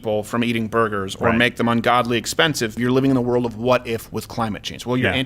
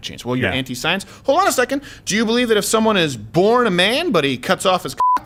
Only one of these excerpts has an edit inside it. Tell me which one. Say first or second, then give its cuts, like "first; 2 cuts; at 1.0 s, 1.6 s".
first; 1 cut; at 2.8 s